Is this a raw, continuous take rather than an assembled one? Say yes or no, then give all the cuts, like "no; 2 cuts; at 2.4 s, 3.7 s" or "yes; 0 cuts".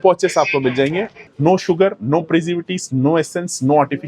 no; 1 cut; at 1.2 s